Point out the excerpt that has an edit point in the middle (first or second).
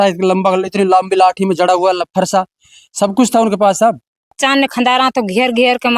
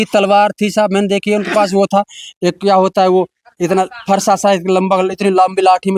first